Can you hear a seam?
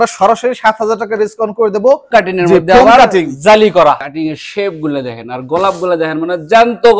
yes; 2 cuts; at 2.0 s, 4.0 s

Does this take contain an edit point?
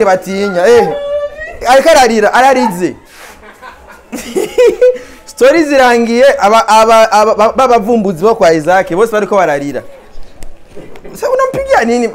no; 0 cuts

